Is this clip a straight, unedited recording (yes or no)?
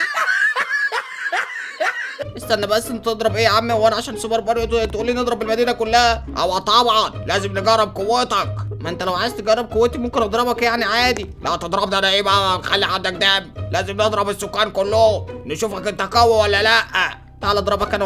yes